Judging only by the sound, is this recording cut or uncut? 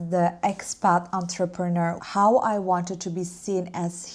cut